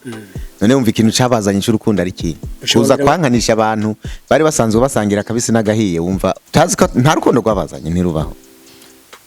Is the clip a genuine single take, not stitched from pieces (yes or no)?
no